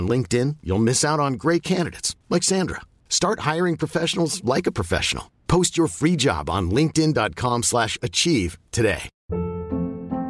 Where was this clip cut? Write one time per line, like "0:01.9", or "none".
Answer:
0:09.1